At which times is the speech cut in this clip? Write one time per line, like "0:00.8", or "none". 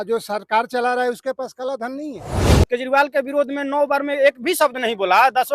0:02.6

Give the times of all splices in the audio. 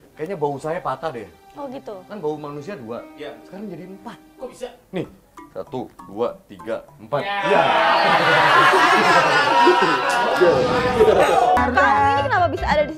0:11.6

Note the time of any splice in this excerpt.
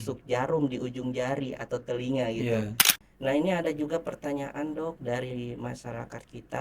0:02.8

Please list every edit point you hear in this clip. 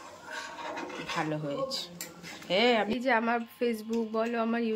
0:02.9

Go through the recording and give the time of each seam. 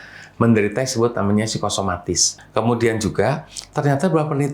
0:02.3

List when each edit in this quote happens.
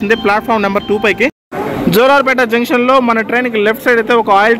0:01.5

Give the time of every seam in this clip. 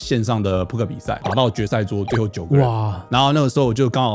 0:01.2
0:02.9

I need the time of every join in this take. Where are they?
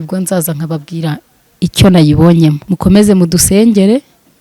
0:02.7

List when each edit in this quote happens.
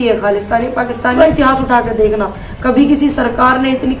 0:01.1

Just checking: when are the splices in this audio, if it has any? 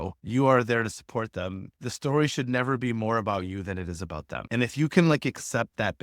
0:04.3

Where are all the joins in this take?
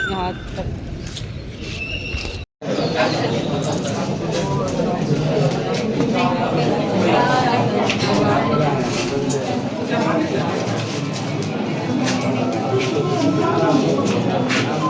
none

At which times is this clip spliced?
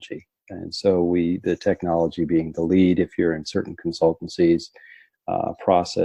none

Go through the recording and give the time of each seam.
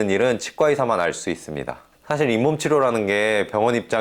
none

